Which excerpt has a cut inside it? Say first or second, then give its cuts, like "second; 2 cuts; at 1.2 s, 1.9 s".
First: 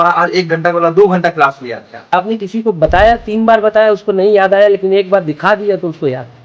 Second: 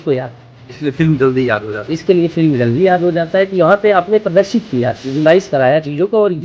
first; 1 cut; at 2.1 s